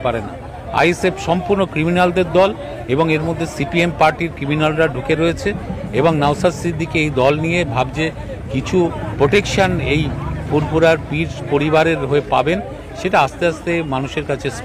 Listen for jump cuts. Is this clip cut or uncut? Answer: uncut